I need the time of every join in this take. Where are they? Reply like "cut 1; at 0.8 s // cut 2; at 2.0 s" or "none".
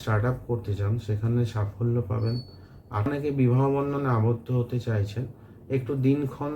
cut 1; at 3.1 s

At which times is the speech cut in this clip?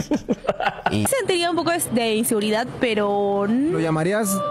cut 1; at 1.1 s

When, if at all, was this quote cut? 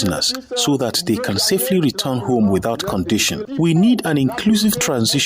cut 1; at 3.5 s

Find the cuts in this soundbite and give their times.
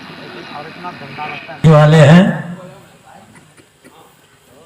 cut 1; at 1.6 s

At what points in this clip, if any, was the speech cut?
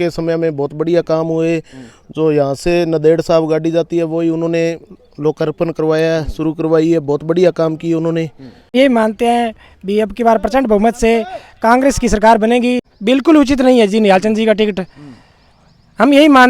cut 1; at 8.7 s // cut 2; at 12.9 s

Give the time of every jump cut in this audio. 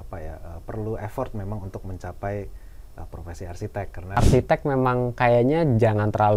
cut 1; at 4.2 s

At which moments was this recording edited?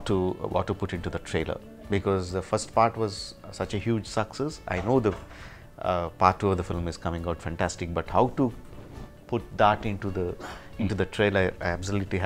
none

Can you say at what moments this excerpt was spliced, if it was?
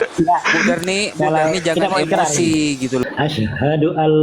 cut 1; at 3.0 s

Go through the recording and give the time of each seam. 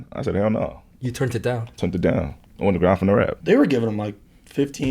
cut 1; at 3.4 s

